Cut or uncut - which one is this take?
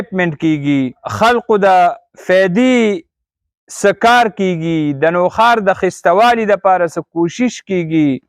cut